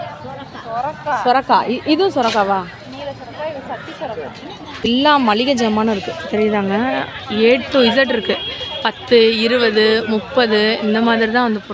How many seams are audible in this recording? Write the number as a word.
one